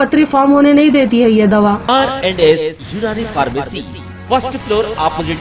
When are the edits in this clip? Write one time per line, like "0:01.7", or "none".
0:01.8